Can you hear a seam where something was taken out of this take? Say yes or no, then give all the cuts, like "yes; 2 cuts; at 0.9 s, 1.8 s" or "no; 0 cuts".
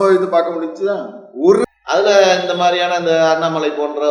yes; 1 cut; at 1.6 s